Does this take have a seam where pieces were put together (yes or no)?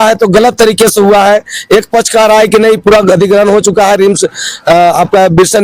no